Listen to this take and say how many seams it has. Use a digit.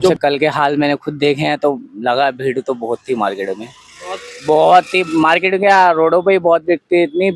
0